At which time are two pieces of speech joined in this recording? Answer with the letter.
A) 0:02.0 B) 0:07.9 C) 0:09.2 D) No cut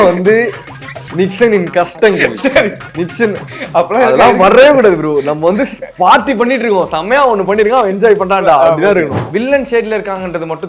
C